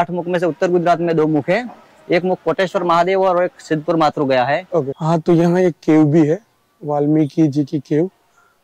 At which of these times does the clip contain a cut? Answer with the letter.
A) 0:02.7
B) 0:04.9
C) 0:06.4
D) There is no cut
B